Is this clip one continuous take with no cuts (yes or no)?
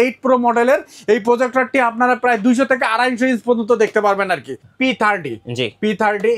no